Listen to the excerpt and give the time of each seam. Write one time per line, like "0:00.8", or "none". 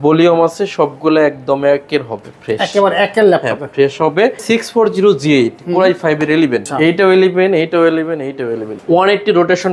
0:04.4
0:06.7
0:08.7